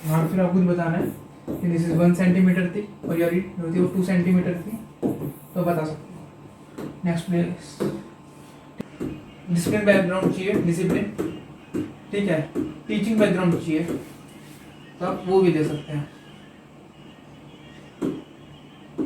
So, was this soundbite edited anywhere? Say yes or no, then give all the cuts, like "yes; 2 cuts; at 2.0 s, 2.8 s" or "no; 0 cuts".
yes; 1 cut; at 8.6 s